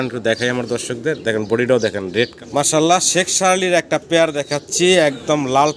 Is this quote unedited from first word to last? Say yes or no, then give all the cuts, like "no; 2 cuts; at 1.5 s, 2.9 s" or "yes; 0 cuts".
no; 1 cut; at 2.3 s